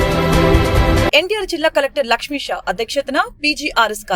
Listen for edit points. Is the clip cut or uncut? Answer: cut